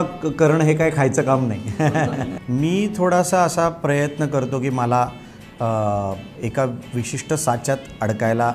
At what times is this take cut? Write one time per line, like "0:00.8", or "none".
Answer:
0:02.3